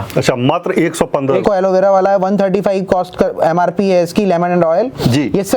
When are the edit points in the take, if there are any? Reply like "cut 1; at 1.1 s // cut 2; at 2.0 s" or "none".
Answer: cut 1; at 1.4 s